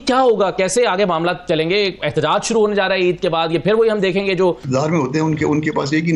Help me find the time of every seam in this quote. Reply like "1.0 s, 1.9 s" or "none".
4.6 s